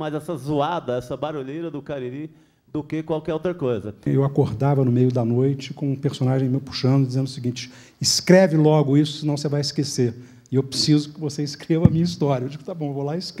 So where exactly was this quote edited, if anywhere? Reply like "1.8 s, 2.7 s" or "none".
4.0 s